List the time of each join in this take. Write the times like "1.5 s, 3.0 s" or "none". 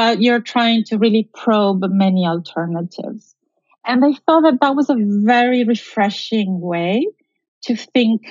none